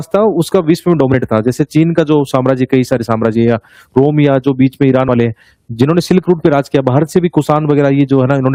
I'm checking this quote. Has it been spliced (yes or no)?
no